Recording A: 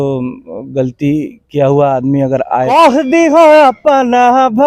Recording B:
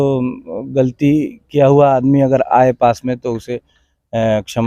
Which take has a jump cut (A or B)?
A